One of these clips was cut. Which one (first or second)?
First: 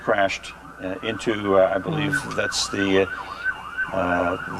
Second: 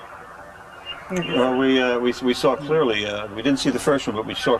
first